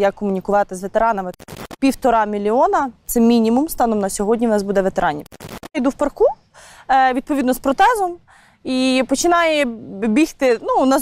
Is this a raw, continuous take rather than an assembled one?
no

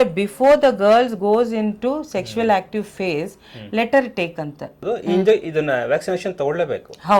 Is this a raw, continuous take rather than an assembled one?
no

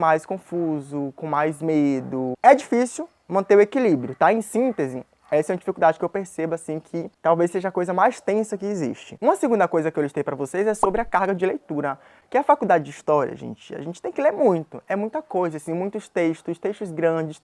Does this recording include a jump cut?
no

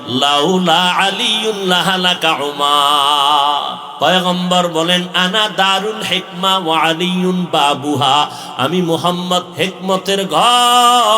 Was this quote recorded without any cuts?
no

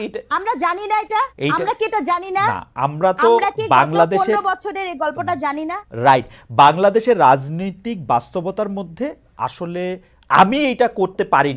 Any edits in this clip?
no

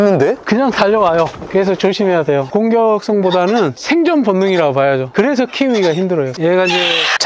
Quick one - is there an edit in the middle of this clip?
yes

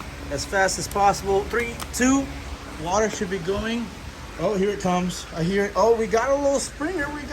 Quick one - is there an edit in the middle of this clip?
no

